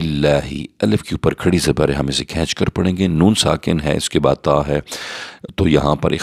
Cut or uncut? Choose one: uncut